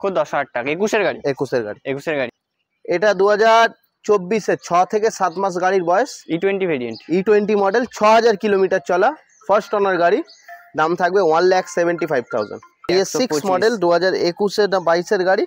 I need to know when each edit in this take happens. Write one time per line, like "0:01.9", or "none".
0:02.4
0:12.8